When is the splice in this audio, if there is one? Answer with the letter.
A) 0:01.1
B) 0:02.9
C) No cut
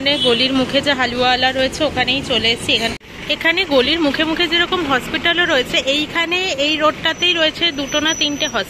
B